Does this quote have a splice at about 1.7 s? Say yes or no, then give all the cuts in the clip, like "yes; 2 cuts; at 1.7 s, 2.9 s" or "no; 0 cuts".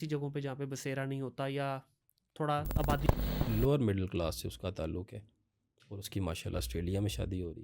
no; 1 cut; at 3.0 s